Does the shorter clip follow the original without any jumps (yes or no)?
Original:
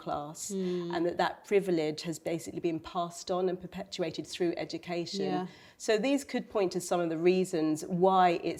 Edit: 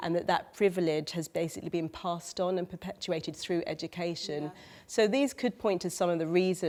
yes